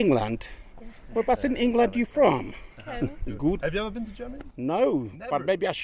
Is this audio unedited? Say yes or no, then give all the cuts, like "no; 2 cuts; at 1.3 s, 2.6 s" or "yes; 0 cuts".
no; 1 cut; at 3.2 s